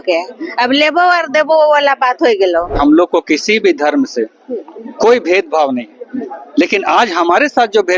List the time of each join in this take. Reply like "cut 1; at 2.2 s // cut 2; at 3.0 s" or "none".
cut 1; at 2.7 s